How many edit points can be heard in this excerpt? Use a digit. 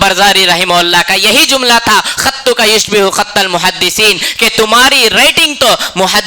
0